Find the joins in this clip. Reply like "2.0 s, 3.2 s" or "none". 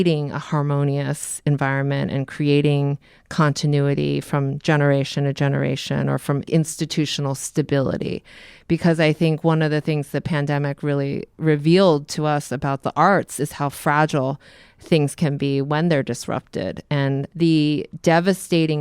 6.5 s, 17.3 s